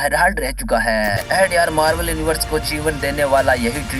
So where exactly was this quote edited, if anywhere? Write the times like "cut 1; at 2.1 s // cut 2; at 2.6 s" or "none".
cut 1; at 1.2 s